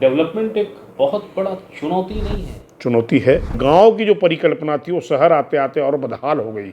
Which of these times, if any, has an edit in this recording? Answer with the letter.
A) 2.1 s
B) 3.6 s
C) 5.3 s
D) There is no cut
B